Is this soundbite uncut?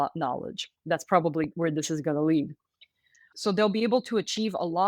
no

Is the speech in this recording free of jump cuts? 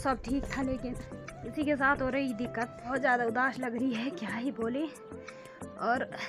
no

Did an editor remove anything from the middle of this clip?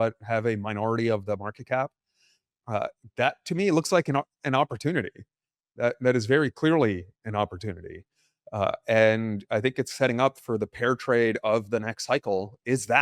no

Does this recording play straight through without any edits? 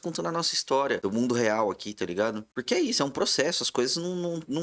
no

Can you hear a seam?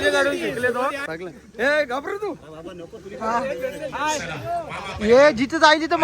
yes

